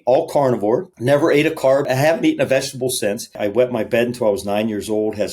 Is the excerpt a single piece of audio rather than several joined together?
no; 3 cuts; at 0.9 s, 1.9 s, 3.4 s

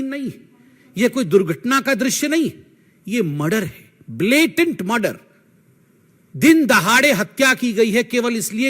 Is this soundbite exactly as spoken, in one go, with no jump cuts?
yes; 0 cuts

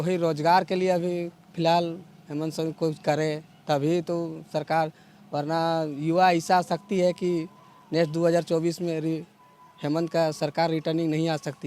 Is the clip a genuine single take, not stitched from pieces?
yes; 0 cuts

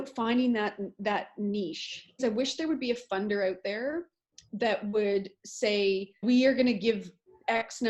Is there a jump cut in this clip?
yes; 2 cuts; at 2.2 s, 6.2 s

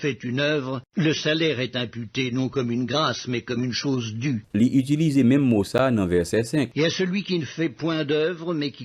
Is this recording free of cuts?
yes; 0 cuts

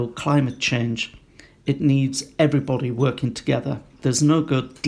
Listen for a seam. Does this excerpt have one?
yes; 1 cut; at 3.9 s

